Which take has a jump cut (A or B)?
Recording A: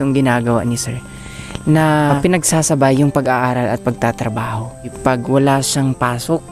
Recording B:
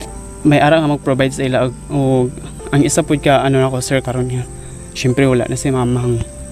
A